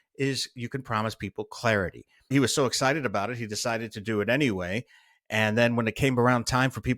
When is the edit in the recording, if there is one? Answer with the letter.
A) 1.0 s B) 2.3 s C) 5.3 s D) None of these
B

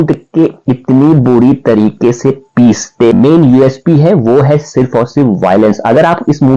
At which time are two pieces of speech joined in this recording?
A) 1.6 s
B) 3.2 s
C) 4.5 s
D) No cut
B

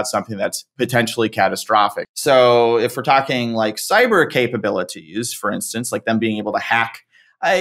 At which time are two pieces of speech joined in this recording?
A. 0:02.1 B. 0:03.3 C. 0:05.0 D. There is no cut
A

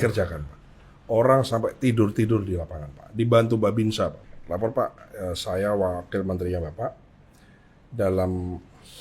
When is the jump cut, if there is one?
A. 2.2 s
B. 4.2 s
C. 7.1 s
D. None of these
B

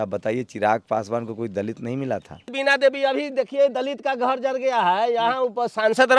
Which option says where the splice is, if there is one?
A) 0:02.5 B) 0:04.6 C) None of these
A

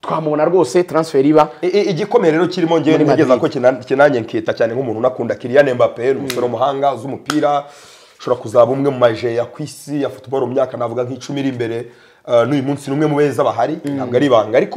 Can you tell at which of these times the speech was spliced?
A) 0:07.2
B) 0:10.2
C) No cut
C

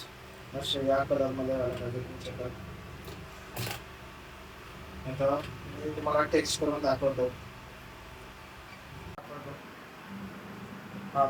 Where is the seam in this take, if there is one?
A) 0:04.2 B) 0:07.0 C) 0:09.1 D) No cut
C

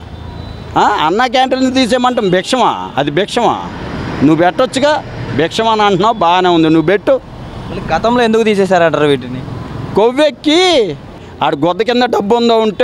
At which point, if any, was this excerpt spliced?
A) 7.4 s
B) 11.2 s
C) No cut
B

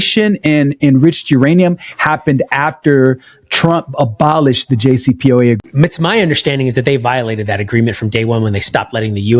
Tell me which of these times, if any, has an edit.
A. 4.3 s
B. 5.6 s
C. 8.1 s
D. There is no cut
B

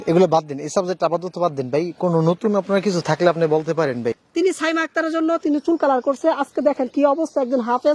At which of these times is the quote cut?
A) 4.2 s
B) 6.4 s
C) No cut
A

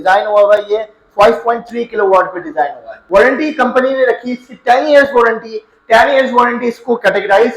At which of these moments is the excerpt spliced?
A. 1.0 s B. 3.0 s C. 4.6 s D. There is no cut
B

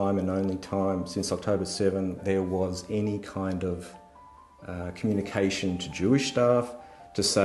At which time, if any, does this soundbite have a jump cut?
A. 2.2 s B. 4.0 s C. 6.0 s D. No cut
A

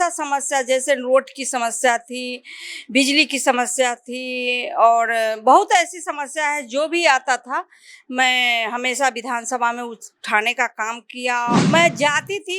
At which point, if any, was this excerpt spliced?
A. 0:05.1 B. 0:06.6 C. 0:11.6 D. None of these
C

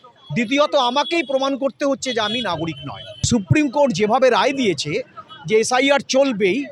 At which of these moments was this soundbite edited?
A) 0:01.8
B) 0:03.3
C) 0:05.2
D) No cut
B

